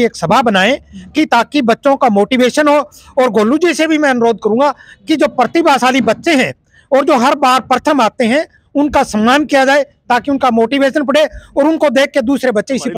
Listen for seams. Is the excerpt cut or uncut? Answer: uncut